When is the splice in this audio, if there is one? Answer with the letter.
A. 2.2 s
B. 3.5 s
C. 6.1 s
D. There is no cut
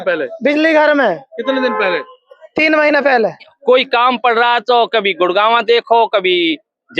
B